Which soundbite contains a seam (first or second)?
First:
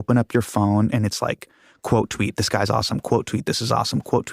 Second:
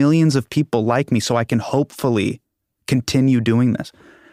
first